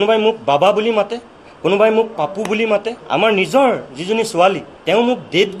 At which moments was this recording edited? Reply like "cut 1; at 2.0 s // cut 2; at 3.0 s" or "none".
cut 1; at 3.0 s // cut 2; at 4.7 s